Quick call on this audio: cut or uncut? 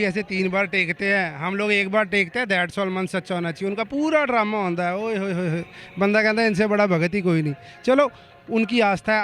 uncut